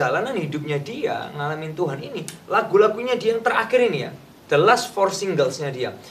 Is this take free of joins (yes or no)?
yes